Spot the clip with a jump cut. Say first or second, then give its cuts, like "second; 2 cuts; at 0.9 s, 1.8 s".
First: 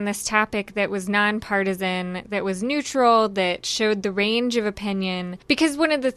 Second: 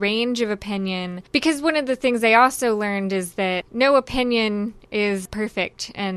second; 2 cuts; at 3.6 s, 5.3 s